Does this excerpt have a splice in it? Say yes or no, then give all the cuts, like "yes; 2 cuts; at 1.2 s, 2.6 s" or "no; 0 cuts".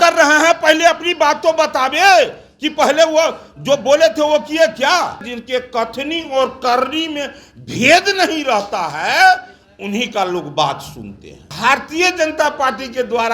yes; 2 cuts; at 5.3 s, 11.5 s